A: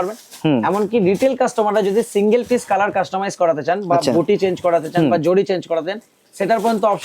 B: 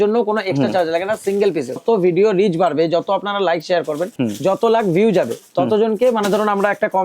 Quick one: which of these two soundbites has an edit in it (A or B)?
B